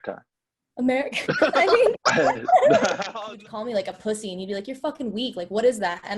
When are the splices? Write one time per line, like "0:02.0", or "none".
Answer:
0:03.1

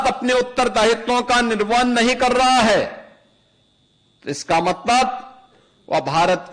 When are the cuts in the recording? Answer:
none

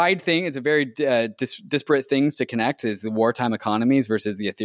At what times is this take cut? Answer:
none

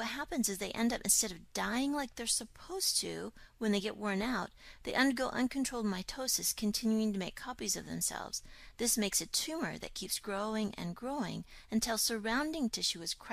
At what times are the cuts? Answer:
0:02.7

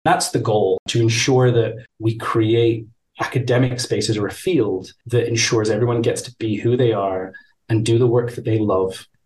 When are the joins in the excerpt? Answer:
0:00.8
0:01.9

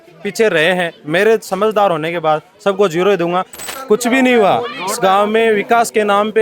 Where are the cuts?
0:03.6

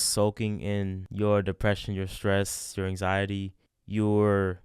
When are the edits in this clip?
0:01.0

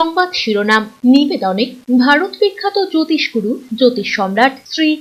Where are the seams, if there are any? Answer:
none

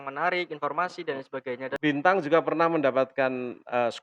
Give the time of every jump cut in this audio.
0:01.7

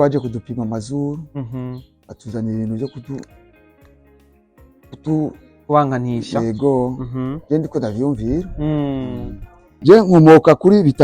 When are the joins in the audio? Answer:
0:09.7

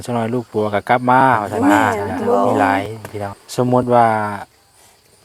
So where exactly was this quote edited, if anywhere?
0:03.4

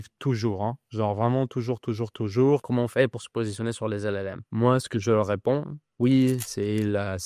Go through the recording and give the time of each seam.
0:02.6
0:04.5
0:05.9

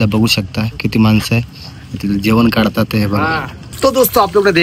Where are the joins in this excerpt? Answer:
none

